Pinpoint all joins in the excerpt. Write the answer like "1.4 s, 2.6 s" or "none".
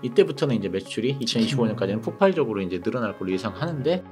none